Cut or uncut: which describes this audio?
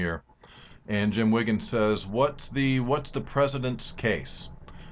cut